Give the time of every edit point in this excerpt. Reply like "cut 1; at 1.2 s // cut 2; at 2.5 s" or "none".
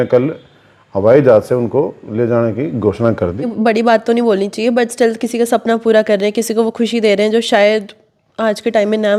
cut 1; at 3.5 s